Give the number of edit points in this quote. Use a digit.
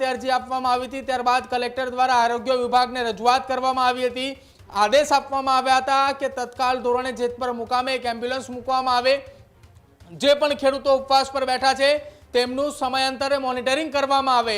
0